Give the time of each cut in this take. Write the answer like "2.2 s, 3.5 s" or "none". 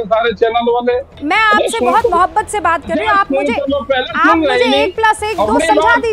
1.2 s